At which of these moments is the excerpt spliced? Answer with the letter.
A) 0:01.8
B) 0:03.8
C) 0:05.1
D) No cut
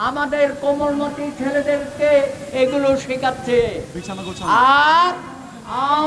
D